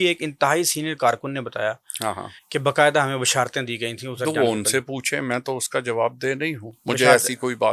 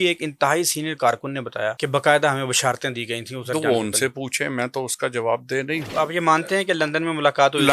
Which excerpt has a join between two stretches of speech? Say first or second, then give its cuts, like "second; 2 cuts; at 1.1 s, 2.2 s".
second; 2 cuts; at 1.8 s, 5.9 s